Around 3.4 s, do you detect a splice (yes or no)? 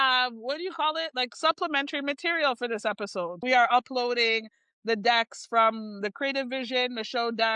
yes